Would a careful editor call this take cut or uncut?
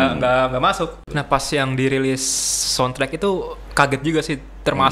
cut